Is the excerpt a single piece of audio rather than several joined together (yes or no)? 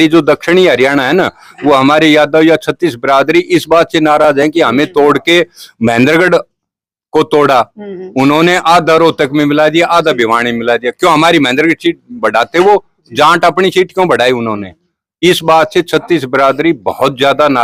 yes